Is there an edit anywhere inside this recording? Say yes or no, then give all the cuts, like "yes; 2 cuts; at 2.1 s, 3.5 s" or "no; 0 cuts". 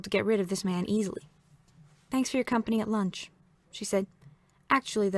no; 0 cuts